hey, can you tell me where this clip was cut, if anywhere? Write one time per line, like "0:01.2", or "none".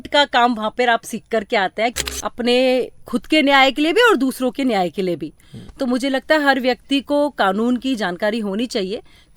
0:02.0